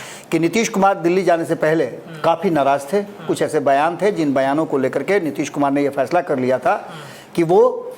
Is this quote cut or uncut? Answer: uncut